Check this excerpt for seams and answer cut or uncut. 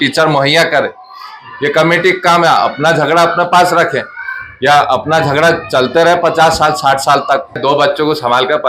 cut